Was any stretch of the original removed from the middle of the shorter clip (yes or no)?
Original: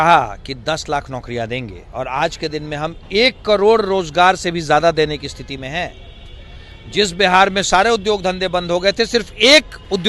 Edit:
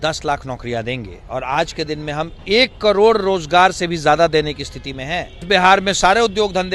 yes